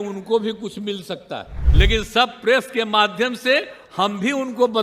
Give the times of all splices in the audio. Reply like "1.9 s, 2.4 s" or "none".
1.6 s